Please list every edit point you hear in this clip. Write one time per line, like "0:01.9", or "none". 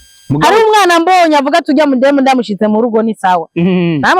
none